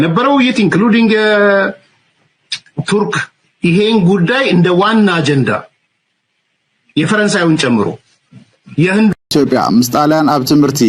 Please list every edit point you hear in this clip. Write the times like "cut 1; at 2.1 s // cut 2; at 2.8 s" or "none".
cut 1; at 9.2 s